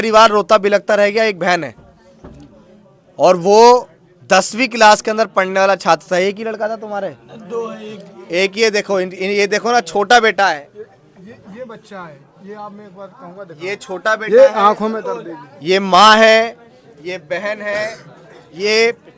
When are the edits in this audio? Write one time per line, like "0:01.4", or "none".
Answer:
none